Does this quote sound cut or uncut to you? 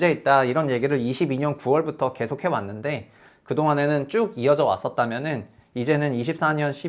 uncut